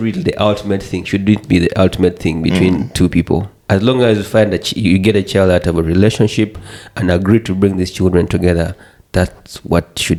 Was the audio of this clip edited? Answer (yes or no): no